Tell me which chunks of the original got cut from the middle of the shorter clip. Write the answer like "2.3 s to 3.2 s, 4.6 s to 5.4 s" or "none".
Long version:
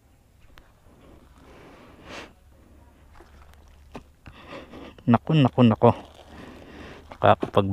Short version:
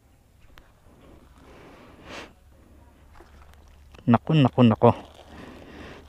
3.9 s to 4.9 s